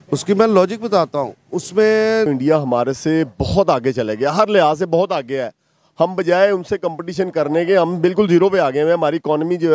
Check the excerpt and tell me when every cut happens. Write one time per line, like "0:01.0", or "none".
0:02.3